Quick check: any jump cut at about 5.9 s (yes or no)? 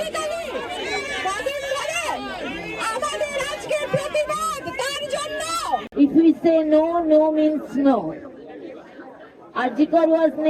yes